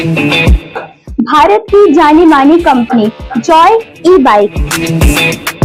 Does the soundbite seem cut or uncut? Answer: uncut